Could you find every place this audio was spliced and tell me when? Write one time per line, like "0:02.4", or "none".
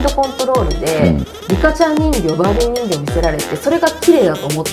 0:01.3